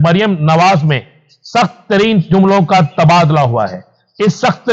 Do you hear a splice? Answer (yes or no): no